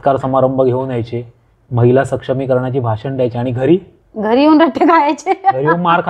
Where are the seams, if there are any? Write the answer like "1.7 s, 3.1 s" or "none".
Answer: none